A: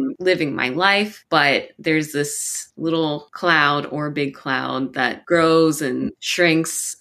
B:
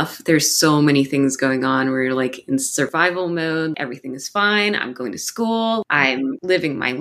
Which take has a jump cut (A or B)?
B